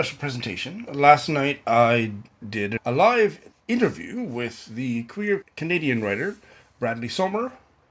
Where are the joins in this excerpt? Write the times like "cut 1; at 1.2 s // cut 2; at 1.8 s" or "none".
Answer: cut 1; at 2.8 s // cut 2; at 3.5 s // cut 3; at 5.5 s